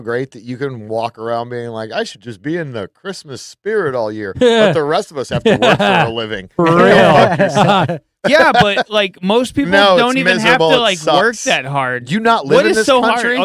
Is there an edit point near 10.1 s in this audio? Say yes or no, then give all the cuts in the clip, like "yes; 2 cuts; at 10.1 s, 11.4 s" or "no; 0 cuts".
no; 0 cuts